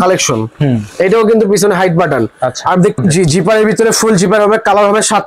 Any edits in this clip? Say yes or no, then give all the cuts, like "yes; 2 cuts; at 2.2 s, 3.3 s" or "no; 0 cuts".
yes; 1 cut; at 3.0 s